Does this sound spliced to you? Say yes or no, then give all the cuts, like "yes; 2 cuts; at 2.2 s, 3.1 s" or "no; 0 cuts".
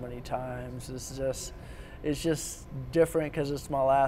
no; 0 cuts